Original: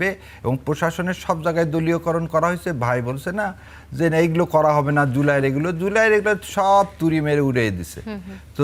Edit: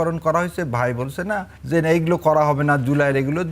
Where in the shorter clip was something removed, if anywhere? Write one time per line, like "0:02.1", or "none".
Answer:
0:01.5